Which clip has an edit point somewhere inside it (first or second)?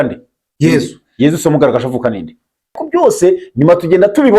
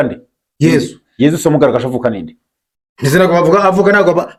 first